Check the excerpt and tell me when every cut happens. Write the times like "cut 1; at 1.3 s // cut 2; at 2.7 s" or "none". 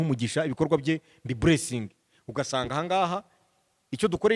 none

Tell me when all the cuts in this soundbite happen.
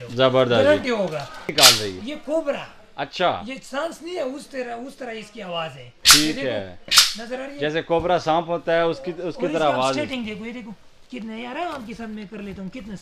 cut 1; at 1.5 s

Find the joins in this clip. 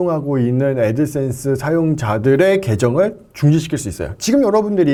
none

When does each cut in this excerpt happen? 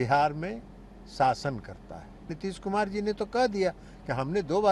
cut 1; at 2.3 s

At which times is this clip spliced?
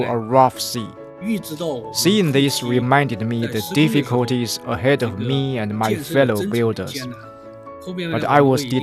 cut 1; at 1.2 s

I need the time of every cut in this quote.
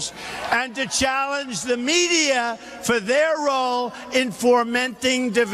cut 1; at 4.6 s

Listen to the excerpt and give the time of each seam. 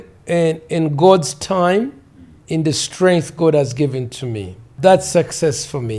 cut 1; at 2.4 s // cut 2; at 4.7 s

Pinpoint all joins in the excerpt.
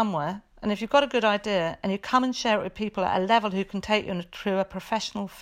none

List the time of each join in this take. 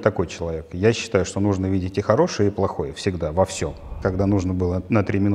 cut 1; at 4.0 s

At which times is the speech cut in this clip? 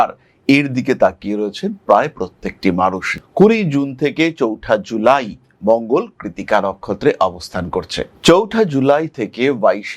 cut 1; at 3.2 s

